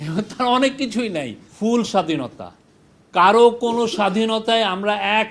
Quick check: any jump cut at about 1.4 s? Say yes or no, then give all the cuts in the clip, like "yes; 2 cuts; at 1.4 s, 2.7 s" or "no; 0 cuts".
yes; 1 cut; at 1.4 s